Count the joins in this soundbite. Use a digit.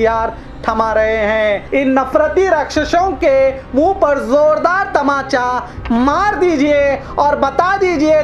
1